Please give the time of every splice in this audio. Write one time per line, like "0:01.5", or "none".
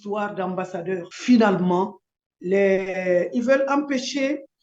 0:01.1